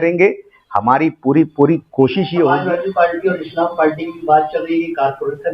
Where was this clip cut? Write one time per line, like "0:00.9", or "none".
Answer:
0:02.6